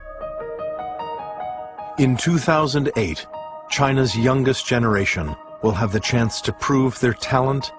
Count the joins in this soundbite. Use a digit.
0